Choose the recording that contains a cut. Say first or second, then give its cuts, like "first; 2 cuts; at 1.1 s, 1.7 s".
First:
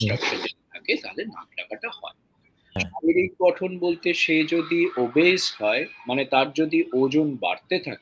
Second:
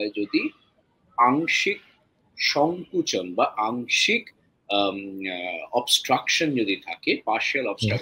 first; 1 cut; at 2.7 s